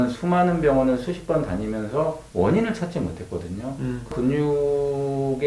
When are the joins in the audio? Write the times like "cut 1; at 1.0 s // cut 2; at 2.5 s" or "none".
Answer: cut 1; at 4.1 s